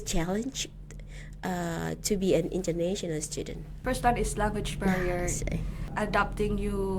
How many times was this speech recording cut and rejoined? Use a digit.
2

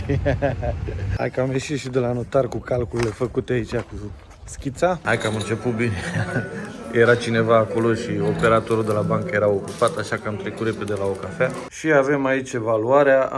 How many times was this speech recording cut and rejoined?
3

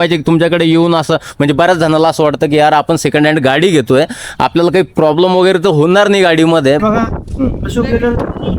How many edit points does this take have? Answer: 1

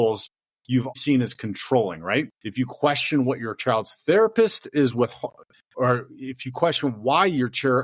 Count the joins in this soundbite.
2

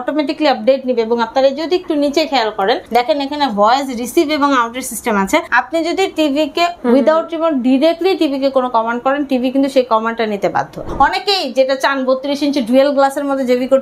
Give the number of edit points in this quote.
4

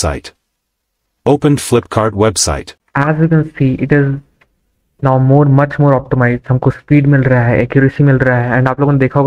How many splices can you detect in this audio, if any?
1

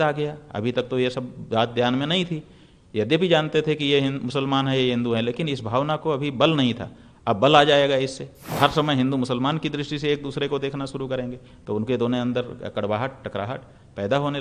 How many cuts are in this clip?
1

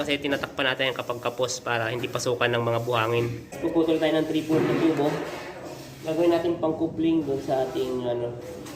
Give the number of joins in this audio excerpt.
1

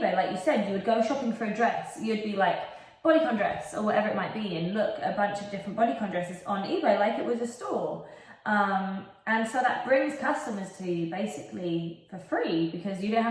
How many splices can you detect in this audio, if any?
0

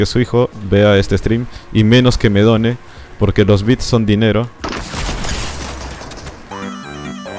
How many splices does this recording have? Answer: 0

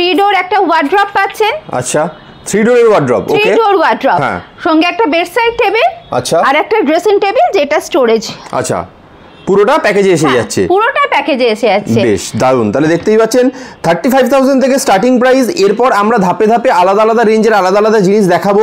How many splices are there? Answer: 0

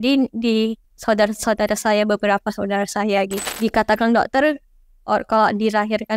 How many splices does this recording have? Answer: 2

